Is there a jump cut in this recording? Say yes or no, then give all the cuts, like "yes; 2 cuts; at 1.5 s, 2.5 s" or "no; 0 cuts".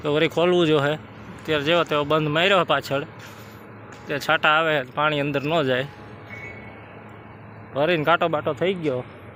no; 0 cuts